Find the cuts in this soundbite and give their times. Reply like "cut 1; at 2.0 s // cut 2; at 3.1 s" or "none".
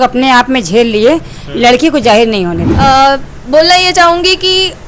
cut 1; at 2.6 s